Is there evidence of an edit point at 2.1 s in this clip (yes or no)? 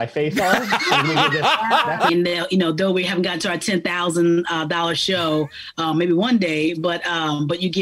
yes